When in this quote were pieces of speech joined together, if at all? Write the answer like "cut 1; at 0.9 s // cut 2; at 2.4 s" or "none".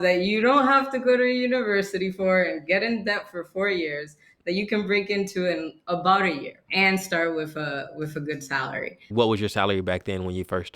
cut 1; at 6.6 s // cut 2; at 9.1 s